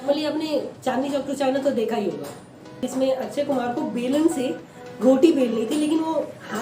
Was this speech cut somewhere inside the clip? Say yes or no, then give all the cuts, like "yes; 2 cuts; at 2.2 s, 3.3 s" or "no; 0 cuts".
yes; 1 cut; at 2.8 s